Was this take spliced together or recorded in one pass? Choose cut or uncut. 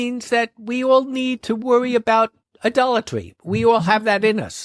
uncut